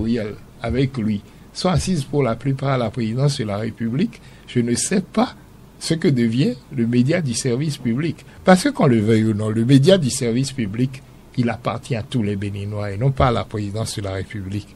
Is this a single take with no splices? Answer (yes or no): yes